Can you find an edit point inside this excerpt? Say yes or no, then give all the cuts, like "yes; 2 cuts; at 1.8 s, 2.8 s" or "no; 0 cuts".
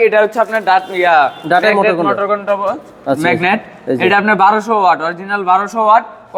no; 0 cuts